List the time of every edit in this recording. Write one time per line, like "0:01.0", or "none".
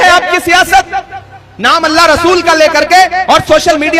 none